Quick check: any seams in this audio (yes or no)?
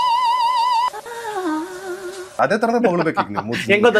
no